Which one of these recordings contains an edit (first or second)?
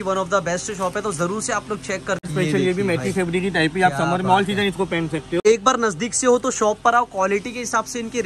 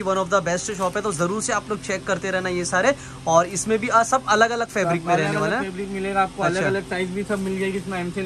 first